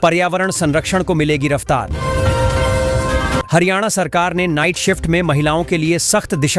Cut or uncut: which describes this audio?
uncut